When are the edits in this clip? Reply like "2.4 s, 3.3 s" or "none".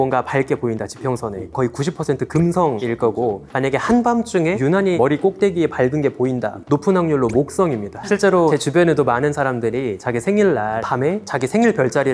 1.5 s, 2.8 s, 4.8 s, 6.6 s, 8.4 s, 11.2 s

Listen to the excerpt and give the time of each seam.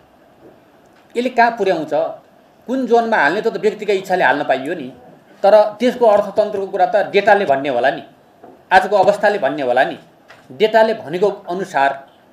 none

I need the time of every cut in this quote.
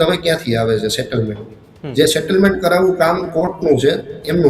none

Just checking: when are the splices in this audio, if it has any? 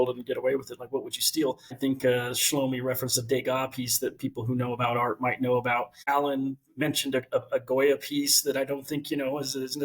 1.7 s, 6.0 s

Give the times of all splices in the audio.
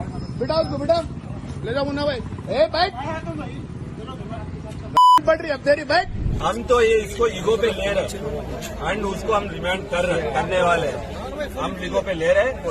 6.2 s

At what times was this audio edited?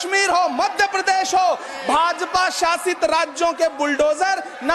none

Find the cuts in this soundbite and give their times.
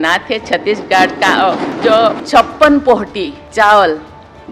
1.8 s, 3.4 s

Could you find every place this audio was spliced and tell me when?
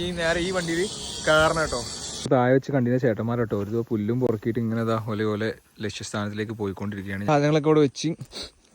2.0 s, 7.3 s

